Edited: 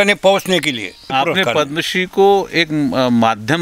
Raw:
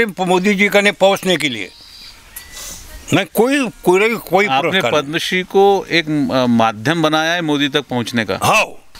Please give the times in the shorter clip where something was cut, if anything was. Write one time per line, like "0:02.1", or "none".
0:01.1